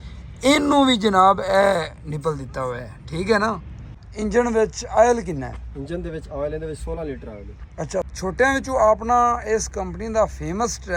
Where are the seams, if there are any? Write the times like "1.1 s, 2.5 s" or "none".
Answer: 3.8 s, 8.1 s